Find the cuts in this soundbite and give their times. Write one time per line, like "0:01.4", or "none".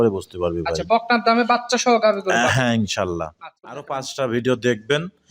0:03.7